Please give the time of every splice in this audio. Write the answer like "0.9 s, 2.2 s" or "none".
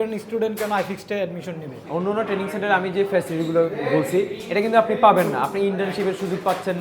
1.7 s